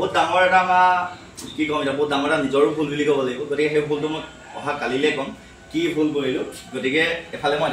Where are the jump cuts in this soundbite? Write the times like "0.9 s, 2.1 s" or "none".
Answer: none